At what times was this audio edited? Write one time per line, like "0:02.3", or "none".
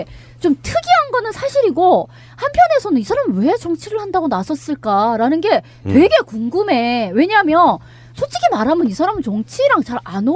0:01.6